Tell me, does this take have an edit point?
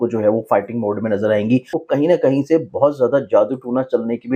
yes; 1 cut; at 1.8 s

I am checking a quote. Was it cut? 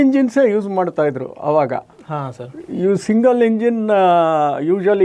no; 0 cuts

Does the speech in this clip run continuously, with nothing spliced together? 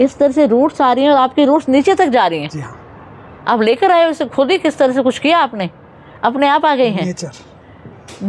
yes; 0 cuts

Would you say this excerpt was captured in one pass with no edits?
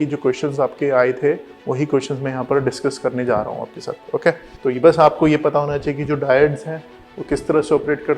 no; 1 cut; at 4.5 s

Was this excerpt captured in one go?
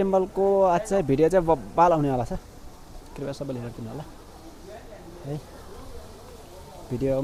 yes; 0 cuts

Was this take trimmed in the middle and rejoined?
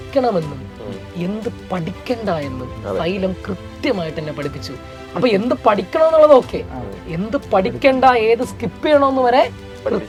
no; 0 cuts

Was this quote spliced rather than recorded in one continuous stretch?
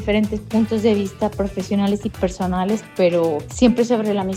no; 0 cuts

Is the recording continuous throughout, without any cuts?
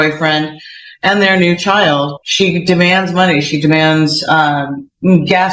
no; 1 cut; at 2.2 s

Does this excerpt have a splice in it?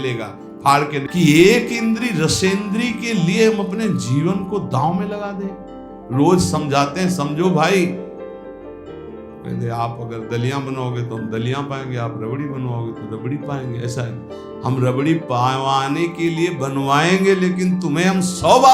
yes; 1 cut; at 1.1 s

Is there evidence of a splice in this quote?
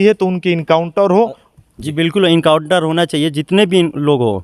no; 0 cuts

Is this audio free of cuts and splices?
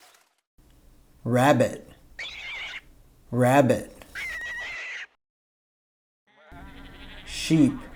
yes; 0 cuts

